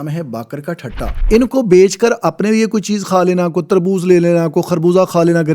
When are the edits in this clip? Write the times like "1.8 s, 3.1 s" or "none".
1.2 s

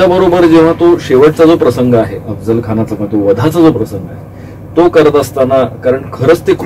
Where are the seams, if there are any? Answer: none

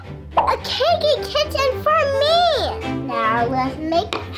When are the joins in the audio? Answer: 2.9 s

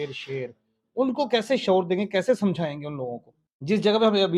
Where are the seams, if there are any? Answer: 3.5 s

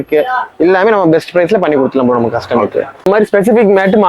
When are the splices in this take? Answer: 3.0 s

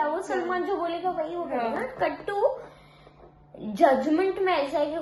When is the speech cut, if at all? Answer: none

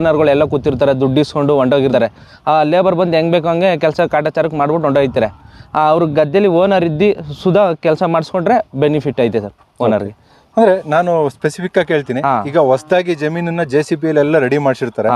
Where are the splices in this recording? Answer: none

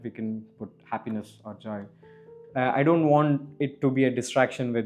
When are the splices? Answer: 2.3 s

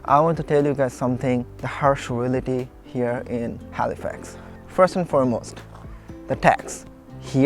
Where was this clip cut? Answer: 1.6 s

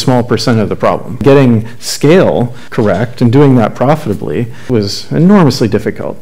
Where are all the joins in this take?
1.2 s, 2.6 s, 4.7 s

